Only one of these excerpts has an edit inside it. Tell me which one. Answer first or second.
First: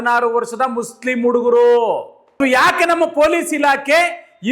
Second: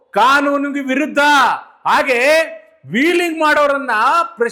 first